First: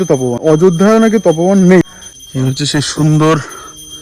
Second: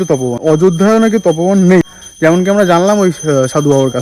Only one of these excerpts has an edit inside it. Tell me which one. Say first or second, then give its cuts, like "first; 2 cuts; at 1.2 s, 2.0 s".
first; 1 cut; at 2.0 s